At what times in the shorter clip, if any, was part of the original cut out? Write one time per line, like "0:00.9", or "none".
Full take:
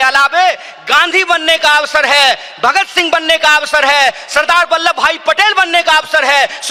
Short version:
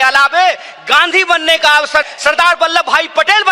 0:02.0

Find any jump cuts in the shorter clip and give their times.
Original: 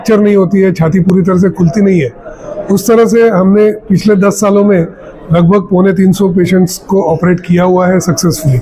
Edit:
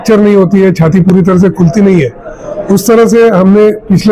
none

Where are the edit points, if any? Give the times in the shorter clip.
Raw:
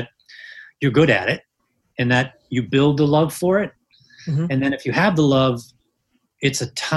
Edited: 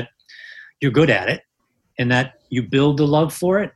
none

